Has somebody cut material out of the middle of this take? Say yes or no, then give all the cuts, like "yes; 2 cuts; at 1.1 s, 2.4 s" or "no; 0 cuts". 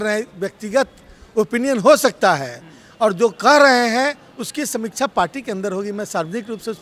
no; 0 cuts